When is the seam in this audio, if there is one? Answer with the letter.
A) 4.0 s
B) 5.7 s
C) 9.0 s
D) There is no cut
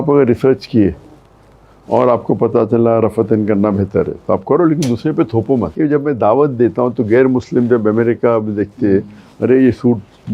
B